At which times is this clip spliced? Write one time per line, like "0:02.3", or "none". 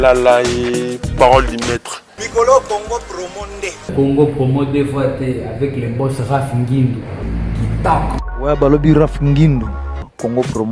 0:03.7
0:07.2
0:08.2

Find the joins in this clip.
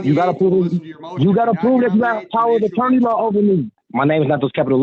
0:03.8

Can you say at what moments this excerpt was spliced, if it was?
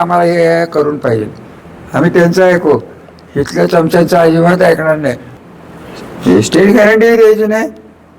0:05.3

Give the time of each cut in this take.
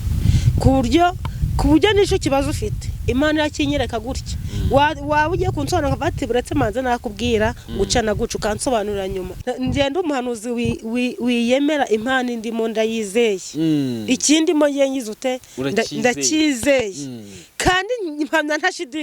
0:09.3

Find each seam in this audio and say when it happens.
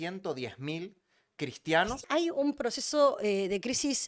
0:02.0

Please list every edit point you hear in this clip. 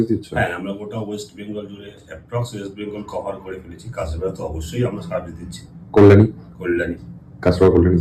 none

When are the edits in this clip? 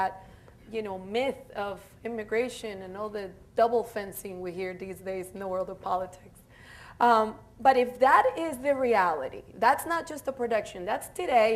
none

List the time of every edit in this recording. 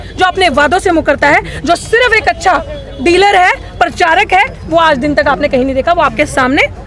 none

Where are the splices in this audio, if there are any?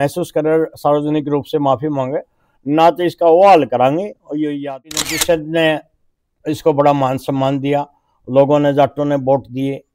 0:05.1

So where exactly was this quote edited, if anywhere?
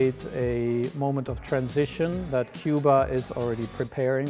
none

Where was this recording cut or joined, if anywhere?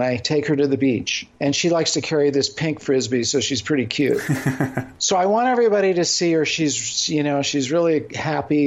0:01.2
0:04.9

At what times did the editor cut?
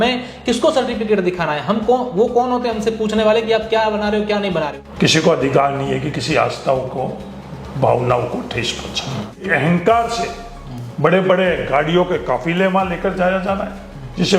0:04.8
0:09.4

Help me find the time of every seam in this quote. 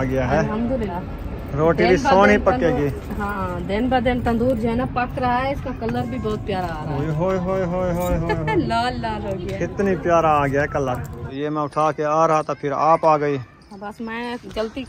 0:00.9
0:03.4
0:11.2

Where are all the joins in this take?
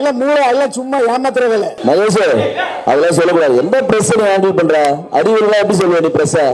0:01.7

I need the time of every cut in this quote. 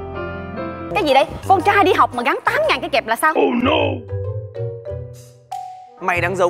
0:00.9

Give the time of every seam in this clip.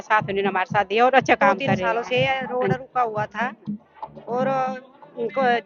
0:01.8

